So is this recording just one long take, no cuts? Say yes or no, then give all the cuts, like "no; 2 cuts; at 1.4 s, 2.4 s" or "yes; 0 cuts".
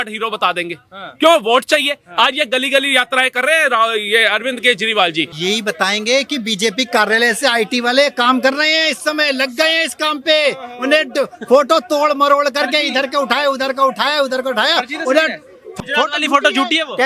no; 2 cuts; at 5.3 s, 15.7 s